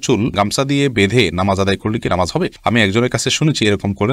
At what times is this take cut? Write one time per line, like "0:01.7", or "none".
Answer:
none

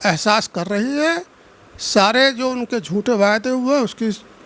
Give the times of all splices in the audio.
none

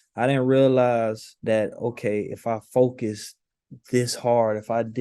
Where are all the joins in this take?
0:01.3

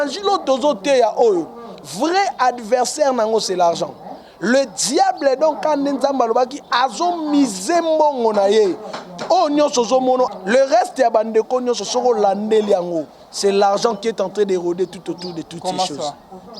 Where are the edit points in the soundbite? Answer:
0:10.3

